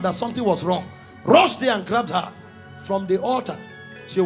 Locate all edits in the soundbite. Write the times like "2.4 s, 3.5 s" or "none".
none